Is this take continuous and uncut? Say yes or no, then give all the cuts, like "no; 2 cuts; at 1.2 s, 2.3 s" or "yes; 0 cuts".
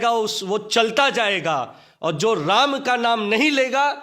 yes; 0 cuts